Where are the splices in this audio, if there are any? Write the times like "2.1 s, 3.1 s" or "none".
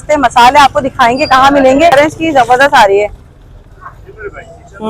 1.9 s